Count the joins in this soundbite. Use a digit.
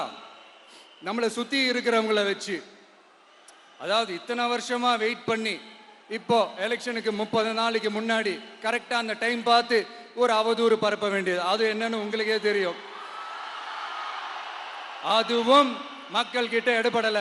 0